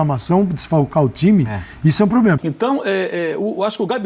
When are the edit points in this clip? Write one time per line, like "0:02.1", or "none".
0:02.4